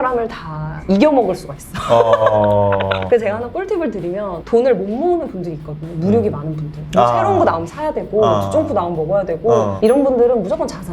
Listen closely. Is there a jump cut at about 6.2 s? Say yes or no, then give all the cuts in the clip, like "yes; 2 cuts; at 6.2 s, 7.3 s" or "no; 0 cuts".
no; 2 cuts; at 3.1 s, 9.7 s